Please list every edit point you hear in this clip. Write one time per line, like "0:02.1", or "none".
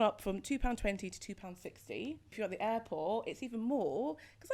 0:02.3